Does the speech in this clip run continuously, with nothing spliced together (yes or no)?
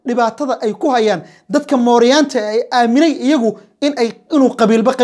yes